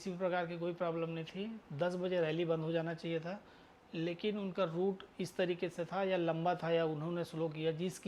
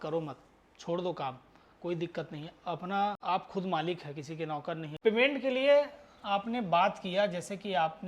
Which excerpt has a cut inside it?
second; 2 cuts; at 3.2 s, 4.9 s

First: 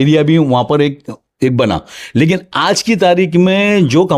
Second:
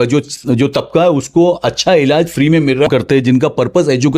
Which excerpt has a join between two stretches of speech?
second; 1 cut; at 2.9 s

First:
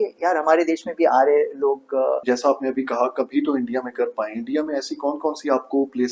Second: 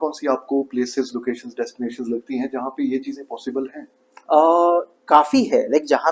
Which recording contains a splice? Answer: first; 1 cut; at 2.2 s

